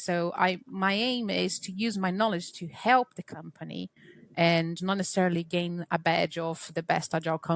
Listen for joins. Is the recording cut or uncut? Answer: uncut